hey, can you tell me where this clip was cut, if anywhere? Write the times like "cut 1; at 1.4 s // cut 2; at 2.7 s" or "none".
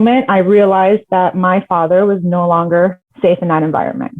cut 1; at 3.1 s